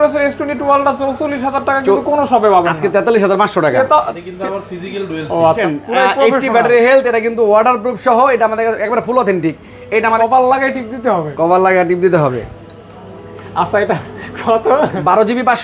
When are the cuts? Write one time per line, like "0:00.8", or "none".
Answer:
0:05.6
0:10.2